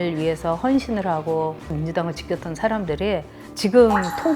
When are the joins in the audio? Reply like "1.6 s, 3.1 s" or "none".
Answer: 1.7 s